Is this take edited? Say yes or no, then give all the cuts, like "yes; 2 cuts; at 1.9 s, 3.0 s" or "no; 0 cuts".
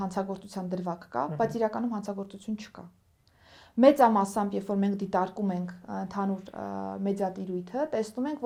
no; 0 cuts